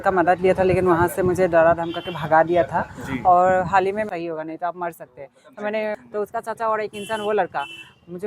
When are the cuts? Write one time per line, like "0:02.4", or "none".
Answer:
0:04.1
0:05.9

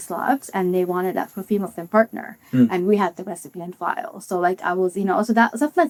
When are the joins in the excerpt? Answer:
none

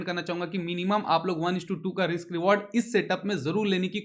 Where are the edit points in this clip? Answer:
none

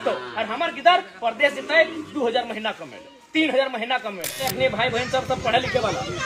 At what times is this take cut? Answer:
0:04.4

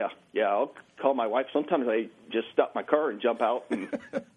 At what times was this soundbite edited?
none

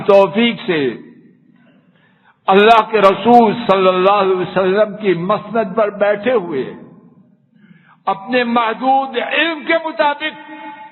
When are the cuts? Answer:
none

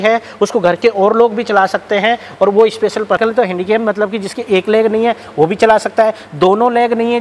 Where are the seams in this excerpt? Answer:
0:03.2

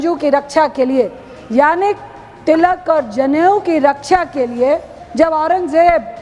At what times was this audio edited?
0:05.0

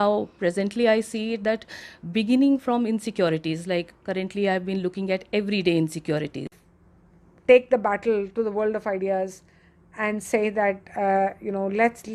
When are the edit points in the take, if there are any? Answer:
0:06.5

